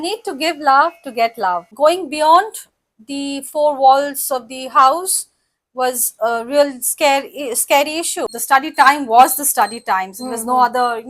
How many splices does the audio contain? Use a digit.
2